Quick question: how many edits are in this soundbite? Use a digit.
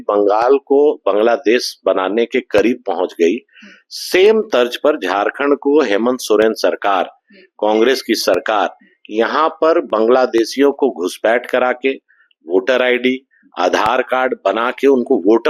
0